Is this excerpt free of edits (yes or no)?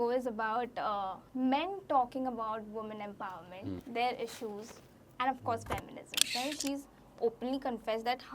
no